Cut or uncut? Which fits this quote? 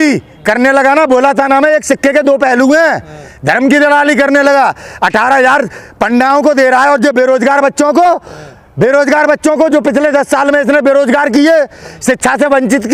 uncut